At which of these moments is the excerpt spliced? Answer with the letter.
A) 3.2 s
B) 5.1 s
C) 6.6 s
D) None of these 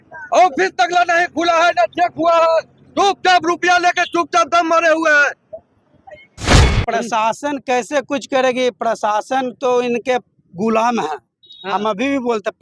C